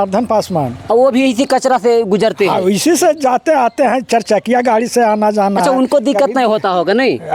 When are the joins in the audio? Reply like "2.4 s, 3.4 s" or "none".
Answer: none